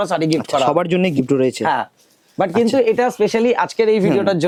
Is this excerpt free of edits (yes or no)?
yes